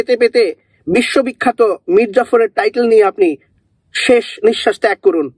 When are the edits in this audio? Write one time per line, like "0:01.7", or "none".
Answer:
none